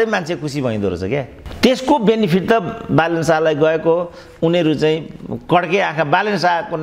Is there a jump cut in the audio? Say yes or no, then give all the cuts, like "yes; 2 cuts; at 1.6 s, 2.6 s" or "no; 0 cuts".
no; 0 cuts